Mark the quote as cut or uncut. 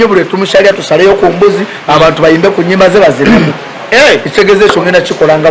uncut